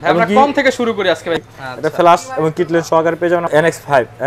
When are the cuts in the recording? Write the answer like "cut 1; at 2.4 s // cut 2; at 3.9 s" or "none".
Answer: cut 1; at 1.4 s // cut 2; at 3.5 s